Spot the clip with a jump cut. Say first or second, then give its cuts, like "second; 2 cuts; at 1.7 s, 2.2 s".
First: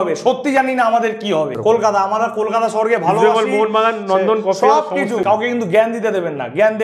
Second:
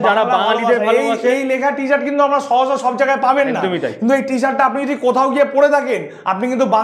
first; 2 cuts; at 1.6 s, 5.2 s